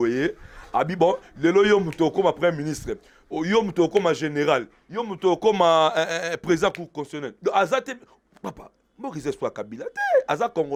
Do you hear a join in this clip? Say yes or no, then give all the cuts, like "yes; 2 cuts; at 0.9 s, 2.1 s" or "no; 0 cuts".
no; 0 cuts